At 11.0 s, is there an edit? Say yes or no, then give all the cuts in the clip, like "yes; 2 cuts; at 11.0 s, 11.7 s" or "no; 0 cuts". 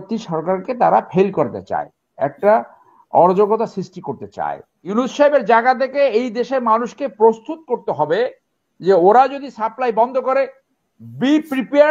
no; 1 cut; at 4.7 s